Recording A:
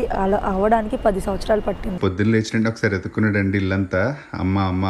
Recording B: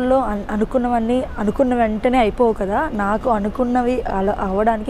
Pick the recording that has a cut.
A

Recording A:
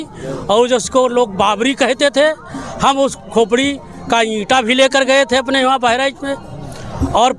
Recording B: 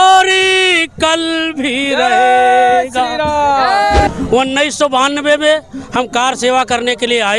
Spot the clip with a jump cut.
B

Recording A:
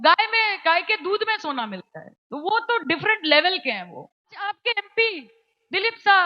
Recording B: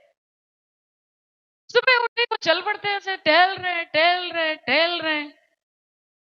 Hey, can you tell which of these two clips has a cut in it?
A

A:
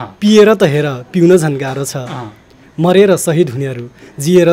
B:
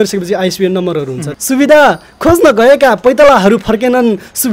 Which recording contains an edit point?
B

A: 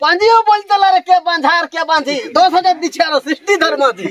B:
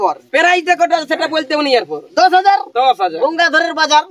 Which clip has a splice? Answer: A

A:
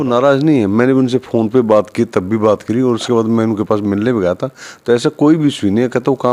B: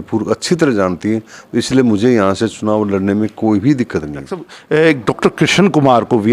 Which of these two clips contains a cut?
B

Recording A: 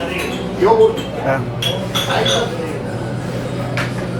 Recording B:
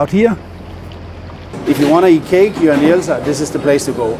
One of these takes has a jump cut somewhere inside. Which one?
B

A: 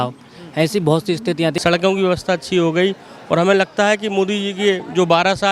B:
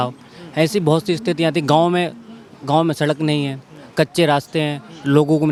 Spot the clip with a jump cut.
A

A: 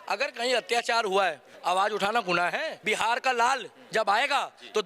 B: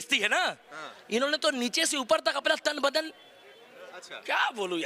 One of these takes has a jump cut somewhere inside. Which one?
A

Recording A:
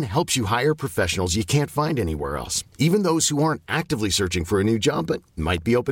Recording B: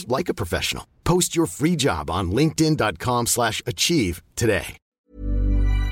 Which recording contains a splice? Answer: B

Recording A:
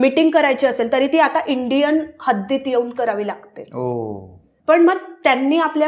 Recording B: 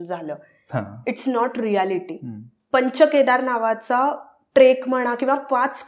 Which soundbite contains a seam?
A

